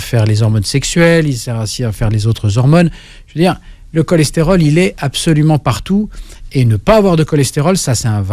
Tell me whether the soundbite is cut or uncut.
uncut